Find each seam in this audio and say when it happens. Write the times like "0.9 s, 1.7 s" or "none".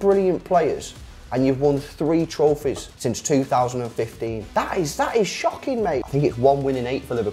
2.9 s, 4.4 s, 6.0 s